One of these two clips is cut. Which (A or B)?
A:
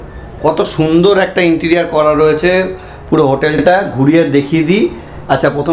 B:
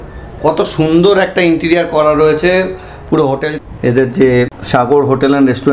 B